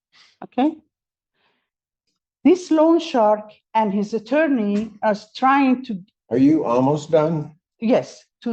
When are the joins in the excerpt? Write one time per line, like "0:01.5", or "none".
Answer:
none